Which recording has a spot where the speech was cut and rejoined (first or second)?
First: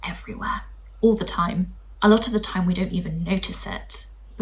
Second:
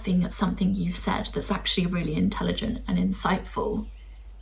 first